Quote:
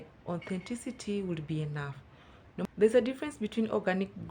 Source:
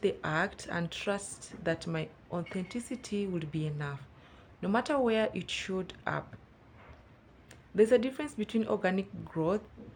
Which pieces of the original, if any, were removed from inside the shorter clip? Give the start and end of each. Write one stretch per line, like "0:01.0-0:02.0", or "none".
0:04.7-0:07.6